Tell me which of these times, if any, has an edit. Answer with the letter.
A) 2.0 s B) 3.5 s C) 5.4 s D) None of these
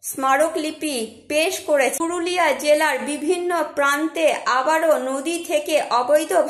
A